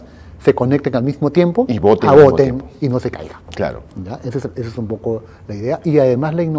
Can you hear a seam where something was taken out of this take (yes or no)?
no